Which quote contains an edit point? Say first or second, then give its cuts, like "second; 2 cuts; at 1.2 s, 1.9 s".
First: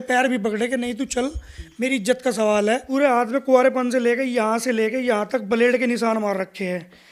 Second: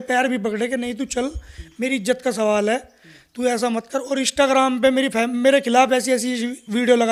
first; 1 cut; at 2.9 s